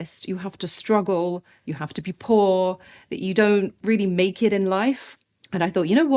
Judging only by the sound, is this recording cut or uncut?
cut